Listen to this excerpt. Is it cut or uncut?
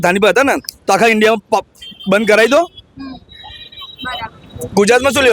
uncut